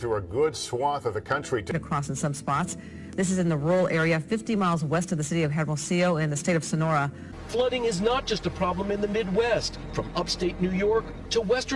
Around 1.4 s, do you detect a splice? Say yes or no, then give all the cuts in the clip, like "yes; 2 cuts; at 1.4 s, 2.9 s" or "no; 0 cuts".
no; 0 cuts